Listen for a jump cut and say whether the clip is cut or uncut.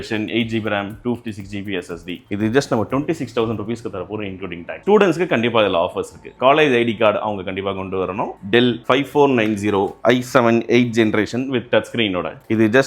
cut